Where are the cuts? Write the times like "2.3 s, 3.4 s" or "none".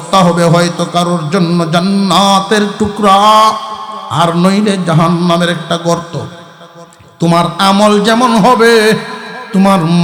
none